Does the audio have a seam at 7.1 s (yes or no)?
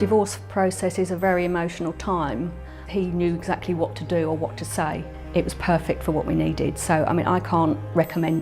no